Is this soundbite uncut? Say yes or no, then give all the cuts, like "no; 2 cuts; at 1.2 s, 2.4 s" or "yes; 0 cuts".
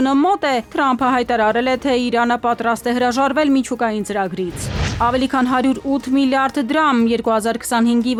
yes; 0 cuts